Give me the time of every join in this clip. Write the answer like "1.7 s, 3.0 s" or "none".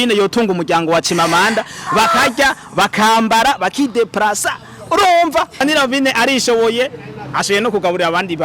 5.6 s